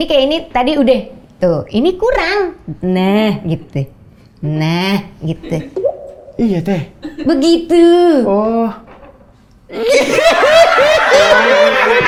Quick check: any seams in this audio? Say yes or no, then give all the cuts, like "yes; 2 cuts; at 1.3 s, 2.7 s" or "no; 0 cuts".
no; 0 cuts